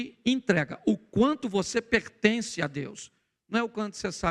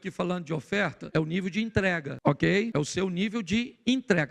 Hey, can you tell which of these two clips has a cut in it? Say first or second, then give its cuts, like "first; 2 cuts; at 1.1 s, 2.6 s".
second; 3 cuts; at 1.0 s, 2.1 s, 2.7 s